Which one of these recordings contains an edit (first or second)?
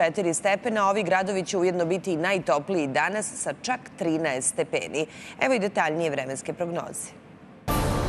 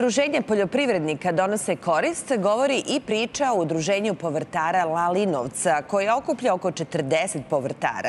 first